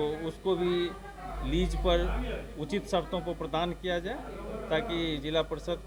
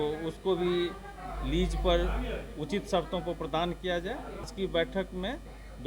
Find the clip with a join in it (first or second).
second